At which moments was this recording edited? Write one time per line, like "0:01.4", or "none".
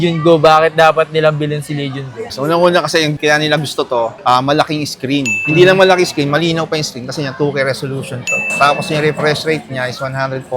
none